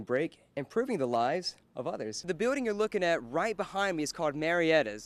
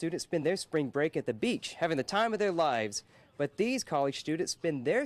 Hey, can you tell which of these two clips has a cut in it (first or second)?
first